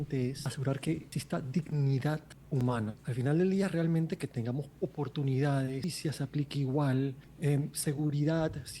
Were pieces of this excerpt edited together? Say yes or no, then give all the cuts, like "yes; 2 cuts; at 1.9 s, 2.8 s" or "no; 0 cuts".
yes; 4 cuts; at 0.9 s, 2.4 s, 5.8 s, 7.3 s